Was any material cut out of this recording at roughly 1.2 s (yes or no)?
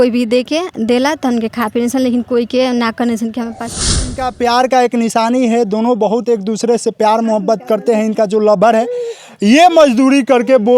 no